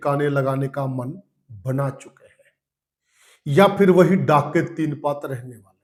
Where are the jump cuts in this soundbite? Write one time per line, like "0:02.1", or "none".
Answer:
none